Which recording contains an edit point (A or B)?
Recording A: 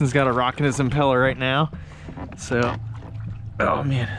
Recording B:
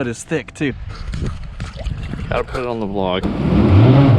B